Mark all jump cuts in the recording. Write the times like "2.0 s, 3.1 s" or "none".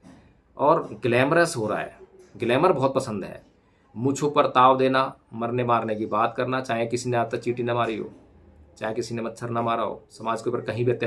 10.1 s